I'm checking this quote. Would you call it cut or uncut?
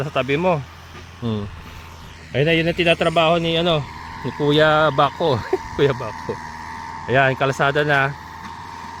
uncut